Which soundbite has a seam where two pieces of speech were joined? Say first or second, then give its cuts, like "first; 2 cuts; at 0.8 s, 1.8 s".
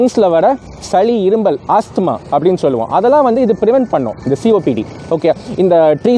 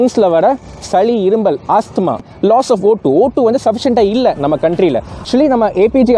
second; 2 cuts; at 2.3 s, 5.1 s